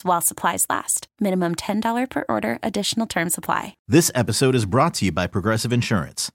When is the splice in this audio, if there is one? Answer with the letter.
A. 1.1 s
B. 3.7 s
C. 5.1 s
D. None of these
B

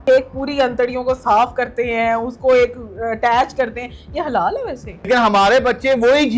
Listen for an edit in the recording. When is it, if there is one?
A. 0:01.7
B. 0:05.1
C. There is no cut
B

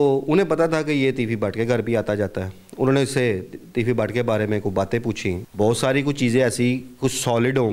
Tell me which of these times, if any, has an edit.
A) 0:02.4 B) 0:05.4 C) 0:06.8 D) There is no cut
B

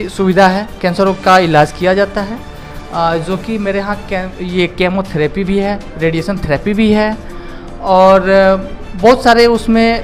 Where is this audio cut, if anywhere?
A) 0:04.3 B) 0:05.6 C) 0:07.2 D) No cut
D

